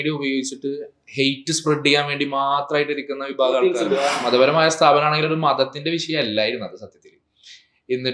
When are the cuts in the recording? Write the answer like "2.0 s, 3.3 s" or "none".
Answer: 4.2 s